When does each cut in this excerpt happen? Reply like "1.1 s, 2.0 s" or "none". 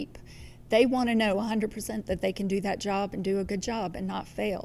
none